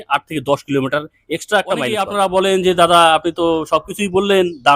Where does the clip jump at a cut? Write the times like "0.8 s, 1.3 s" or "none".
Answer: 2.0 s

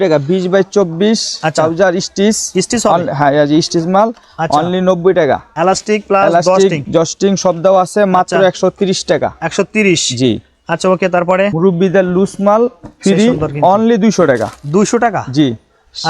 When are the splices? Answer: 5.5 s, 11.5 s

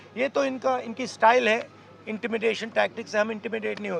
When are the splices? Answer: none

